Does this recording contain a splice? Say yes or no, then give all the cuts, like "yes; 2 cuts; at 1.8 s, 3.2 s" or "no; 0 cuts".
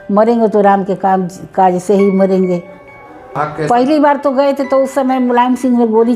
yes; 1 cut; at 3.4 s